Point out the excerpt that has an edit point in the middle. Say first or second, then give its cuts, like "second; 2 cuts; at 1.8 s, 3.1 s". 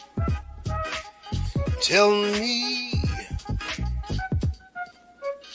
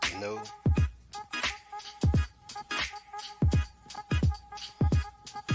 first; 1 cut; at 1.7 s